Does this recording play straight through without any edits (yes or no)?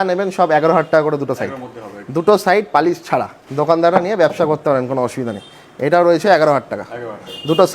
yes